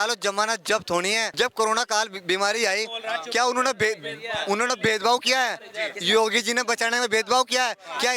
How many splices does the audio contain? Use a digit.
1